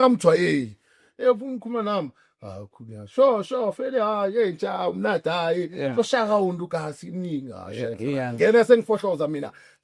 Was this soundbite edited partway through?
yes; 1 cut; at 8.0 s

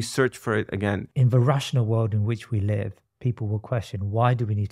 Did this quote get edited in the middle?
yes; 1 cut; at 1.1 s

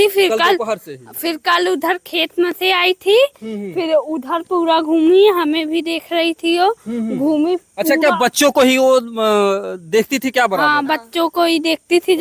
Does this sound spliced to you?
no; 0 cuts

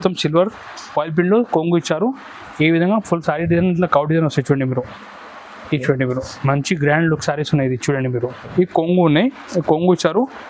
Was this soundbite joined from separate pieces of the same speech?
yes; 1 cut; at 8.4 s

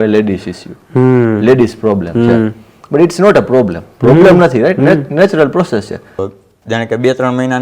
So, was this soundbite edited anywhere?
yes; 1 cut; at 6.2 s

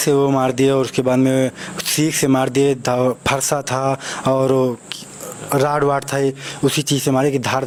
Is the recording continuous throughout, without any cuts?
yes; 0 cuts

